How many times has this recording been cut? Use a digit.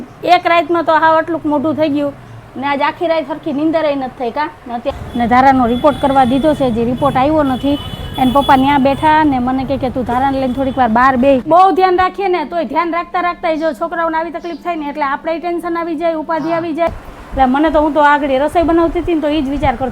3